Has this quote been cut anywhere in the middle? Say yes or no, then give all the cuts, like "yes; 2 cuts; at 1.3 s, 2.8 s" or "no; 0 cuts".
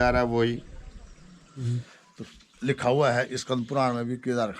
yes; 1 cut; at 1.6 s